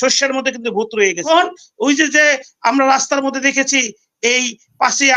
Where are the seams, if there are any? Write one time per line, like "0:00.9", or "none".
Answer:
0:01.3